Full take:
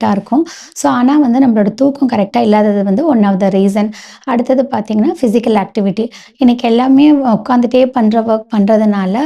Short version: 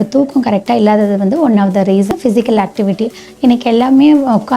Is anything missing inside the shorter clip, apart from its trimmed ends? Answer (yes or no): yes